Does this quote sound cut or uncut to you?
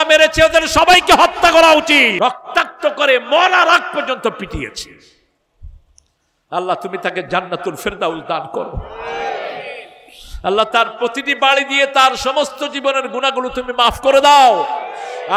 cut